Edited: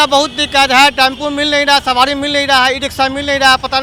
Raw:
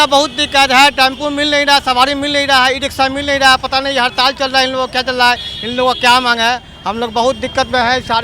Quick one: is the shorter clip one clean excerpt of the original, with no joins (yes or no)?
yes